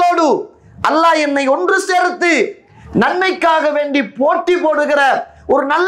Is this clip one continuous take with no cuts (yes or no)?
yes